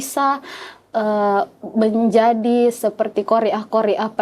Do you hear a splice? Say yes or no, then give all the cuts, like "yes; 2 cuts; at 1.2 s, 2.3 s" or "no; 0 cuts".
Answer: no; 0 cuts